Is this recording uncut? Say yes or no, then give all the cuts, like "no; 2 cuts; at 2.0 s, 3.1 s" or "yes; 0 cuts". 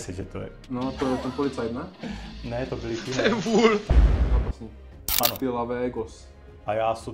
no; 1 cut; at 3.9 s